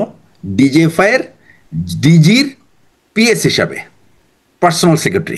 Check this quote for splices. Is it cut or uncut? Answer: uncut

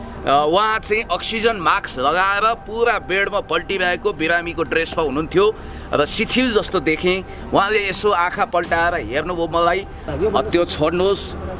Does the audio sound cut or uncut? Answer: cut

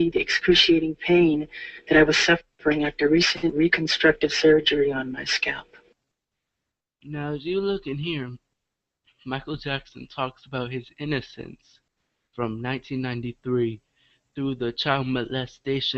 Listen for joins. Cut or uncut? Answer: cut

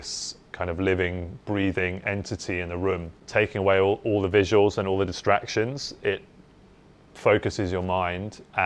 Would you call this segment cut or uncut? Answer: cut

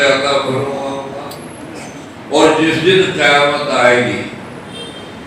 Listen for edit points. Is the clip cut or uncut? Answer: cut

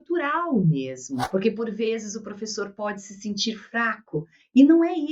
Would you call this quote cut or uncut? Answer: cut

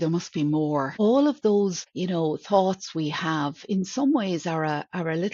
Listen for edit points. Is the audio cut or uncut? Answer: cut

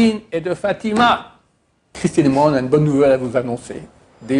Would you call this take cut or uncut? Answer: cut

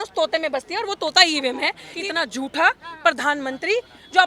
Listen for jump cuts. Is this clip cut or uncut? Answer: cut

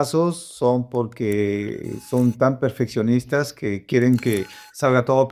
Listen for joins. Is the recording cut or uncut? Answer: uncut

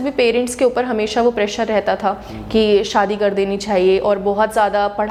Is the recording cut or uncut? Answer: uncut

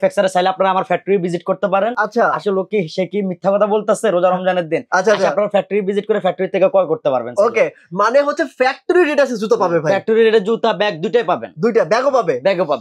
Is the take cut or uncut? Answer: uncut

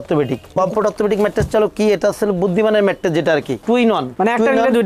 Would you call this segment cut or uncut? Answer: uncut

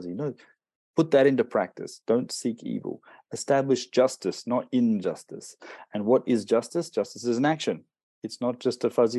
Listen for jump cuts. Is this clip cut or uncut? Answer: uncut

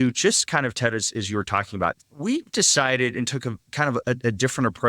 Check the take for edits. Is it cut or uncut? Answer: cut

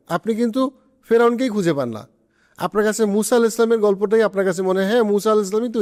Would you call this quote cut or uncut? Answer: uncut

